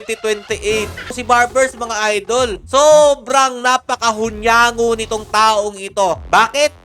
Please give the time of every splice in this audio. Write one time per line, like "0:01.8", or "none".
0:01.2